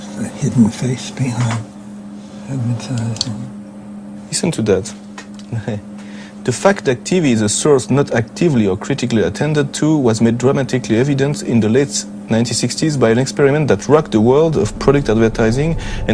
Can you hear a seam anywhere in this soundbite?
no; 0 cuts

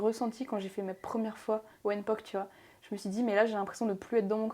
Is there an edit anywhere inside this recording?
yes; 1 cut; at 1.7 s

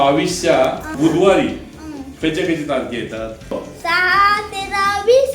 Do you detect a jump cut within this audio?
yes; 2 cuts; at 0.9 s, 3.5 s

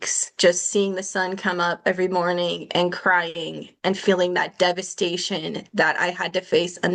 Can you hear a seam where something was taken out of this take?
no; 0 cuts

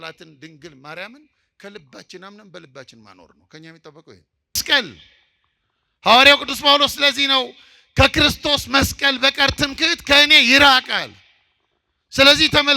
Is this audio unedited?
no; 1 cut; at 4.6 s

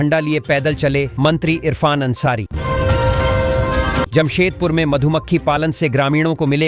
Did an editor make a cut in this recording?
no; 0 cuts

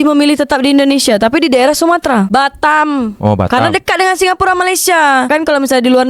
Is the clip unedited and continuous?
no; 2 cuts; at 2.3 s, 5.3 s

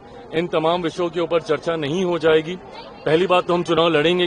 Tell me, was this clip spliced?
no; 0 cuts

